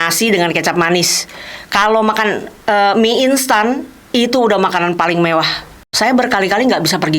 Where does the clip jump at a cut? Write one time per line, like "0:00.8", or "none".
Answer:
0:05.9

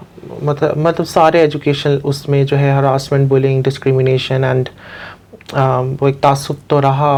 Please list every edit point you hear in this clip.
none

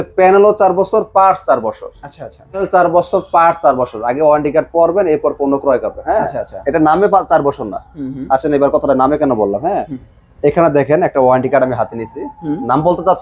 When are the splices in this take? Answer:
0:02.6

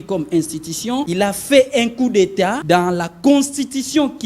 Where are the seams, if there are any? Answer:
0:01.1
0:02.6

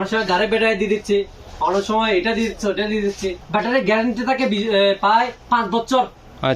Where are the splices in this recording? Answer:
0:03.3

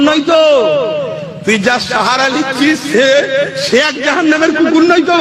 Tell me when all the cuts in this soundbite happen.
none

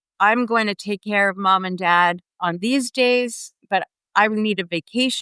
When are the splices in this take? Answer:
none

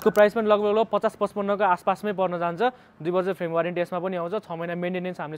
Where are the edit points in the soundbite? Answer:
none

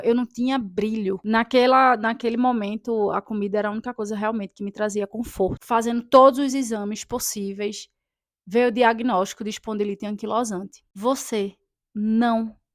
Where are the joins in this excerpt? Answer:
0:01.2
0:05.6
0:10.9

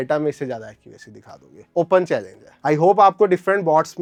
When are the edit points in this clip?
none

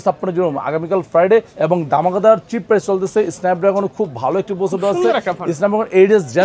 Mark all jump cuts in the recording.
0:01.5

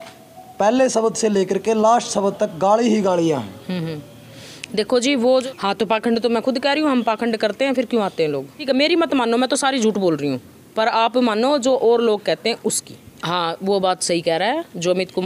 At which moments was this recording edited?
0:05.4
0:08.5
0:13.1

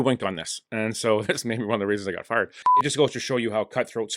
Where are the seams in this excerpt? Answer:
0:02.7

